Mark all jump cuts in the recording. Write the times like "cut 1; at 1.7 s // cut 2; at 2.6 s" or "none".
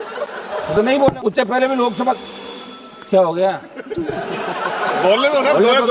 cut 1; at 1.2 s